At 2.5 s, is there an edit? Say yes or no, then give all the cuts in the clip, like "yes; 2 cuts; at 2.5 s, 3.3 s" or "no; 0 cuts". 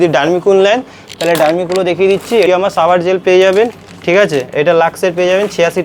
yes; 1 cut; at 2.5 s